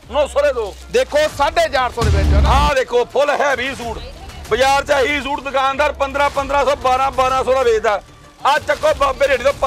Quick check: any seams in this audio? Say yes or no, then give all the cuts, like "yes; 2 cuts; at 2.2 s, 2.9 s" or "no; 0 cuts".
no; 0 cuts